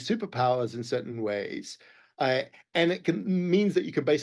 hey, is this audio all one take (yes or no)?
yes